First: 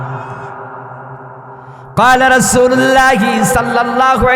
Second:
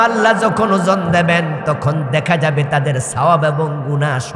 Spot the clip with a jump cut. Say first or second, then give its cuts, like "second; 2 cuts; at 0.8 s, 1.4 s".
first; 1 cut; at 1.9 s